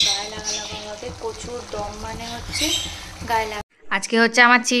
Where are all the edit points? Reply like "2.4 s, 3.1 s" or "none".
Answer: 3.7 s

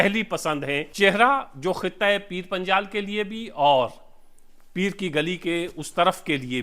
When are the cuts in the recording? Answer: 1.0 s

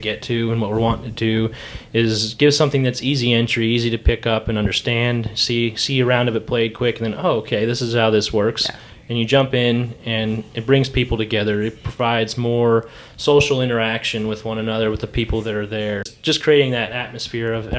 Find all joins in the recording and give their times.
16.1 s

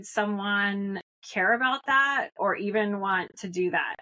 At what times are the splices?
1.1 s

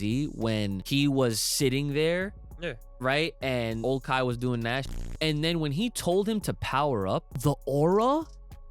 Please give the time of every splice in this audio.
0.8 s, 3.8 s, 4.9 s, 7.3 s

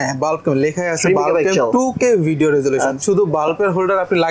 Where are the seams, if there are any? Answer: 3.0 s

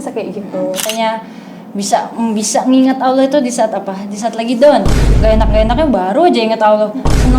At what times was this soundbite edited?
0.9 s, 4.9 s

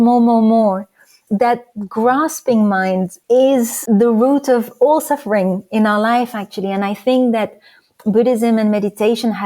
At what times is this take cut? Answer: 1.2 s, 3.1 s, 3.8 s

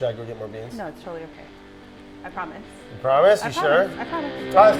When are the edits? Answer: none

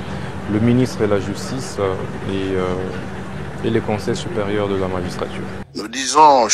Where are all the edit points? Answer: 5.6 s

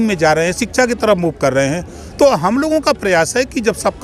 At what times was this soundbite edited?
none

